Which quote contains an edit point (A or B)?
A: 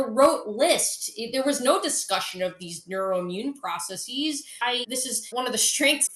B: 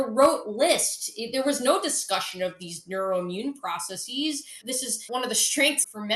B